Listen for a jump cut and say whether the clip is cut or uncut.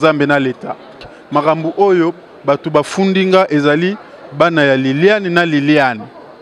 cut